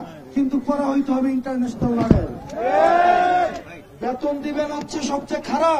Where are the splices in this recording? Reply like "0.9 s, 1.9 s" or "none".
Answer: none